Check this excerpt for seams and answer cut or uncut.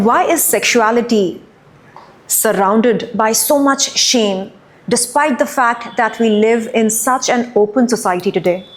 uncut